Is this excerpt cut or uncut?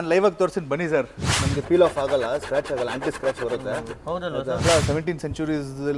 cut